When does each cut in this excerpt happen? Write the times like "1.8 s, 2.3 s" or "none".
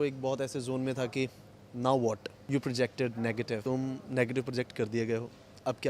2.3 s, 3.6 s